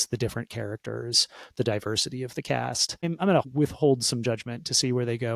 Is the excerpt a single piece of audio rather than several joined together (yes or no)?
no